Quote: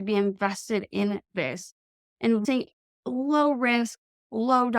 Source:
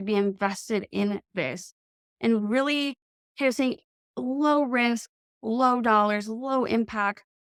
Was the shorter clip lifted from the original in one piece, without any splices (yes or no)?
no